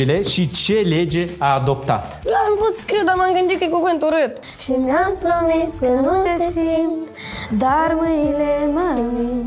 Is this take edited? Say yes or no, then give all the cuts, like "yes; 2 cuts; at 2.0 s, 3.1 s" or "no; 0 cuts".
yes; 2 cuts; at 2.3 s, 4.4 s